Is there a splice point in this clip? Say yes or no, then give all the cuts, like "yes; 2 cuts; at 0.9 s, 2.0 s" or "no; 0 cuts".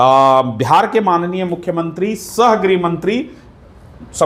no; 0 cuts